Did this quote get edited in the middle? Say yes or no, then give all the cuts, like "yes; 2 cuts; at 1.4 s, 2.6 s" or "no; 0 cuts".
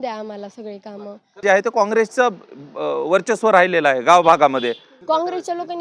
yes; 2 cuts; at 1.4 s, 4.9 s